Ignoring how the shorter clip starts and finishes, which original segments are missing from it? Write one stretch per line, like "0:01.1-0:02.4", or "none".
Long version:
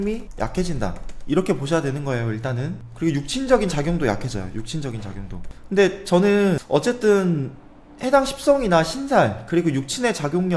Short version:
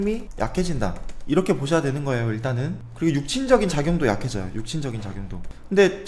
none